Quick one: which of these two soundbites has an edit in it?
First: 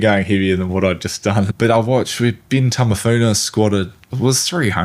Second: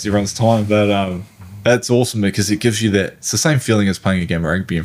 first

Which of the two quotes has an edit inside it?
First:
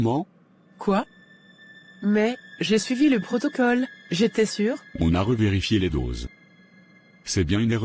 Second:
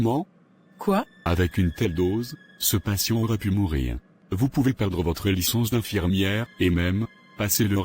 second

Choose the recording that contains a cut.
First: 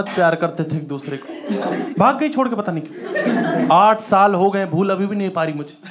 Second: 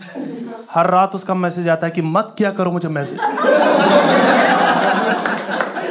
first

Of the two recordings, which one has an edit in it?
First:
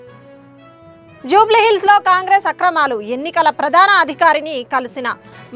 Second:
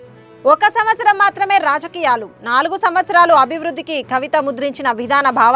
first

